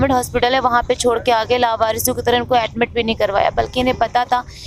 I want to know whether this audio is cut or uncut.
uncut